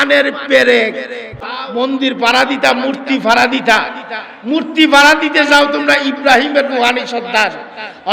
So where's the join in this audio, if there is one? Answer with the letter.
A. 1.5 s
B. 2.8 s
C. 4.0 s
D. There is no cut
A